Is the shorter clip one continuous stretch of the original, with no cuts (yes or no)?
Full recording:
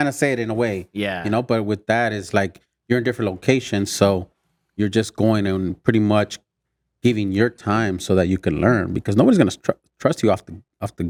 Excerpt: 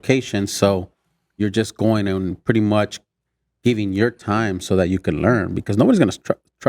yes